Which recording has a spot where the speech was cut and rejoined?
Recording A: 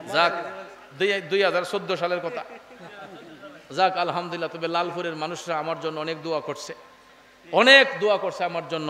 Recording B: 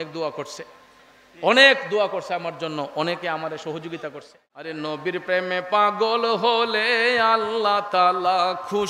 B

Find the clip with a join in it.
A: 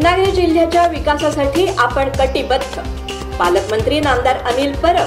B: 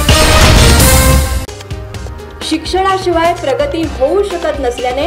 B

